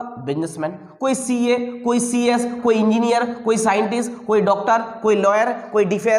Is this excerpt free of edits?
yes; 0 cuts

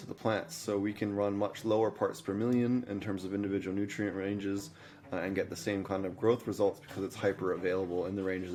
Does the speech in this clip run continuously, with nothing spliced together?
yes; 0 cuts

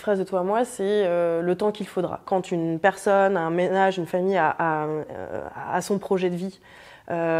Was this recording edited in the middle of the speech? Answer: yes; 1 cut; at 2.3 s

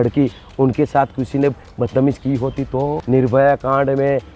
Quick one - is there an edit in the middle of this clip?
yes; 1 cut; at 3.0 s

